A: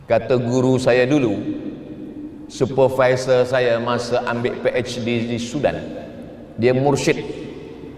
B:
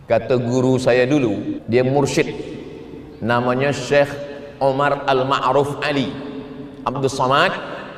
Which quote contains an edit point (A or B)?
B